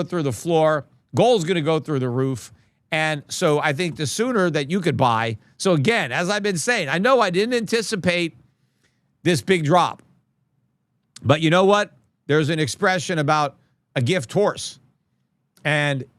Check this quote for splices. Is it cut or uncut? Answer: uncut